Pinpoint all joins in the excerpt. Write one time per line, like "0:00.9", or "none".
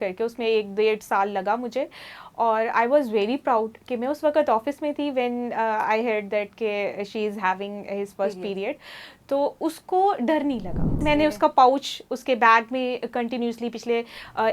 0:11.0